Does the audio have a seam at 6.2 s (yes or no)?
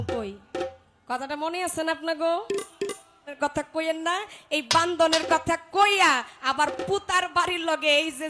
no